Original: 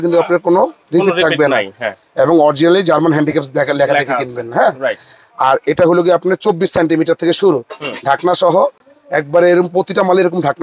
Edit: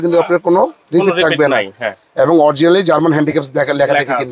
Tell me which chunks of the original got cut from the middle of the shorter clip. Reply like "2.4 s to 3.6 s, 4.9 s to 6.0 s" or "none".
none